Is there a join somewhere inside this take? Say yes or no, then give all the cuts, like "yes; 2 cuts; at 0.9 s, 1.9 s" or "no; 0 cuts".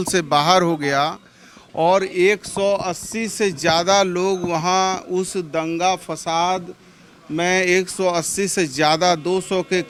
no; 0 cuts